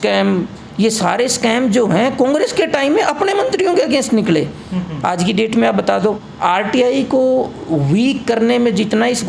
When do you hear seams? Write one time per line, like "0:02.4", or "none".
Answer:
0:06.3